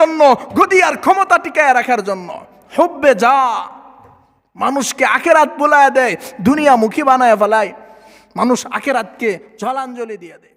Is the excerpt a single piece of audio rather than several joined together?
yes; 0 cuts

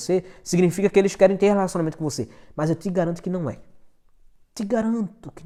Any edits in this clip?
no; 0 cuts

